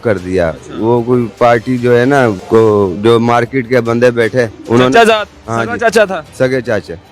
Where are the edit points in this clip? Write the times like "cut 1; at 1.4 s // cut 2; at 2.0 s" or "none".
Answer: cut 1; at 2.4 s // cut 2; at 4.6 s

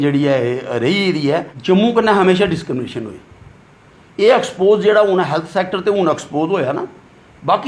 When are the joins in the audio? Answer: cut 1; at 1.5 s

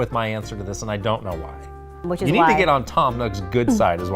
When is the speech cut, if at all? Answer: cut 1; at 2.0 s

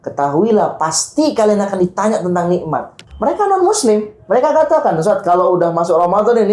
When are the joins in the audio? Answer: cut 1; at 3.0 s

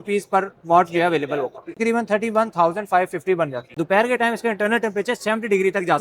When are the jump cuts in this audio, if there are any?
cut 1; at 1.7 s // cut 2; at 3.7 s

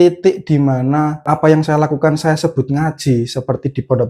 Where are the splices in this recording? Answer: cut 1; at 1.2 s

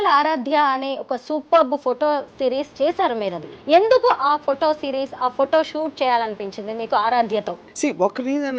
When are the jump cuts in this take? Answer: cut 1; at 3.5 s

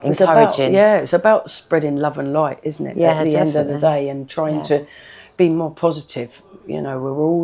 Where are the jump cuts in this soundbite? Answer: none

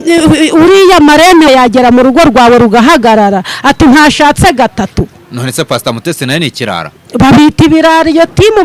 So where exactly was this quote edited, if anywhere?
cut 1; at 1.5 s

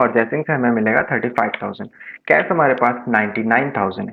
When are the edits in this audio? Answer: none

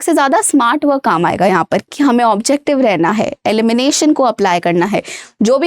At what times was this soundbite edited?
cut 1; at 1.9 s

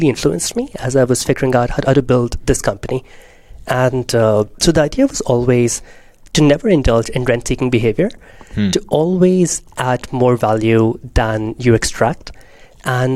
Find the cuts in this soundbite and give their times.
none

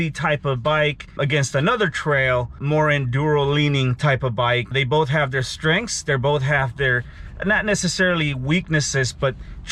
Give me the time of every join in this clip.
cut 1; at 1.2 s // cut 2; at 2.6 s // cut 3; at 4.7 s

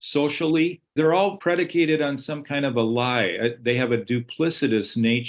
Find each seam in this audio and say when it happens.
cut 1; at 1.3 s

